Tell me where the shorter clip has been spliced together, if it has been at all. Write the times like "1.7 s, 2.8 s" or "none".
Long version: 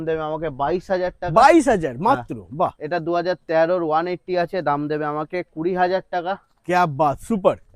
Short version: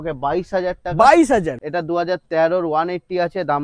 1.6 s